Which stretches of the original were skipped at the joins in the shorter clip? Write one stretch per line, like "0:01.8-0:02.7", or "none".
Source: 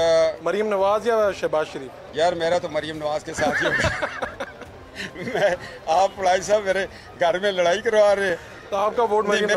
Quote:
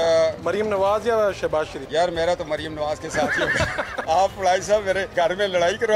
0:01.8-0:02.0
0:04.2-0:05.8
0:06.9-0:07.1